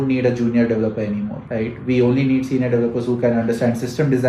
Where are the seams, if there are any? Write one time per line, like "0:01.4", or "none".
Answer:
0:01.4